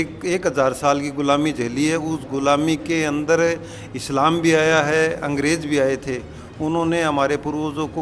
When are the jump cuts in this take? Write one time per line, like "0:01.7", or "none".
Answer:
none